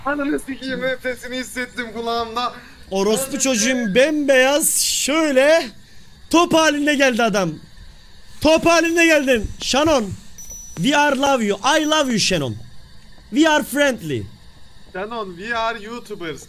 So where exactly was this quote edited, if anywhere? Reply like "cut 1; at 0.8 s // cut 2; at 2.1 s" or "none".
none